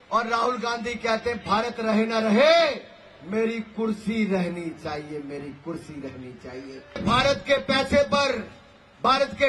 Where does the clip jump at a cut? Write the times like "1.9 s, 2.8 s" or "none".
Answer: 7.0 s